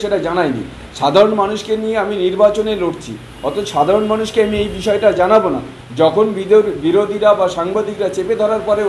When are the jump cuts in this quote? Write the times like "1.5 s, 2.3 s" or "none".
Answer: none

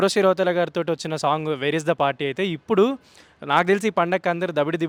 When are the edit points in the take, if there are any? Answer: none

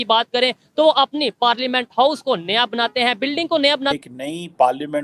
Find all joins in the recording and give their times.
3.9 s

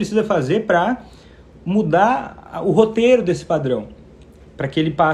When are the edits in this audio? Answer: none

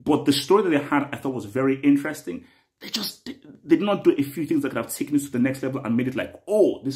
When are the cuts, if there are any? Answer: none

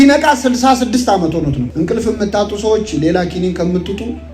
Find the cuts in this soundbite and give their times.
1.7 s

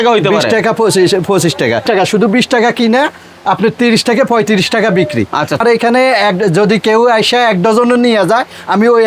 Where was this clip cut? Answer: 1.8 s, 5.6 s

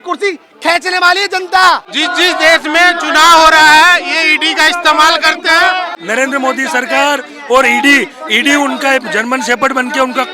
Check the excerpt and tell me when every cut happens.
1.9 s, 5.9 s

